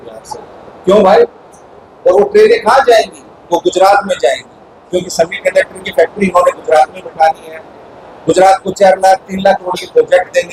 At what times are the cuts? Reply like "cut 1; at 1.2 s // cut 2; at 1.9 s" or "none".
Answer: none